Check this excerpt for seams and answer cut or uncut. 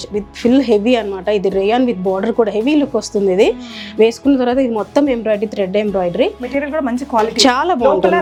uncut